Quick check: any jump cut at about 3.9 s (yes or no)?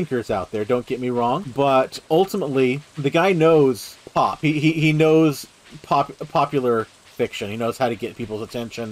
yes